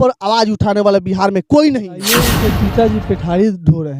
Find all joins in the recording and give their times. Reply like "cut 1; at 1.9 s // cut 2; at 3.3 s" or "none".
cut 1; at 2.3 s